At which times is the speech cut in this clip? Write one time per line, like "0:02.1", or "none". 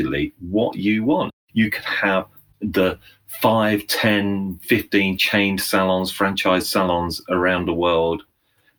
0:01.3
0:02.4